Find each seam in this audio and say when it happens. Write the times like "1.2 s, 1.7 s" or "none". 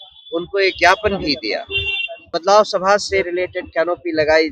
2.3 s